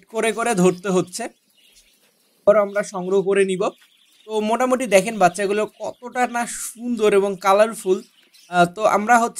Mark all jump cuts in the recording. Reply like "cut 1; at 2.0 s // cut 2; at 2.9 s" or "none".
cut 1; at 2.5 s